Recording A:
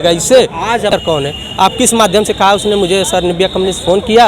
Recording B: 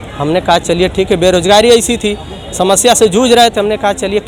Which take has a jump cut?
A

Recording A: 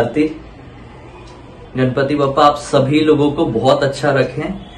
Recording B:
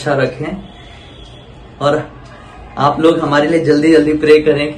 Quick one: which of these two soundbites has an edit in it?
A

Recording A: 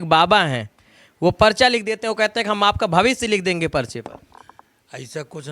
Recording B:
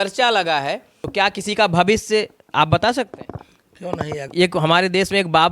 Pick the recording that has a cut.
B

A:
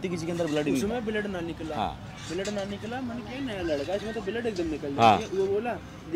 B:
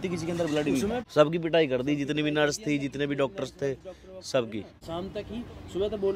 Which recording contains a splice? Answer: B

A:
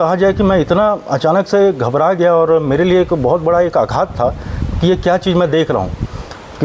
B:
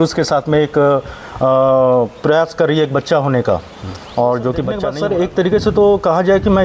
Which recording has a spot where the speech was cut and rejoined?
B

